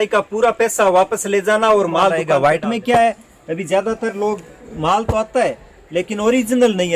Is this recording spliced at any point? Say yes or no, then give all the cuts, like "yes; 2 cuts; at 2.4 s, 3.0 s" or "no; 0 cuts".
yes; 1 cut; at 2.2 s